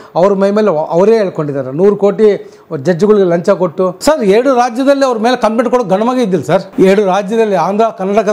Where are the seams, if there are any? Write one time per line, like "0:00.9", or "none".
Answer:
0:04.0
0:06.7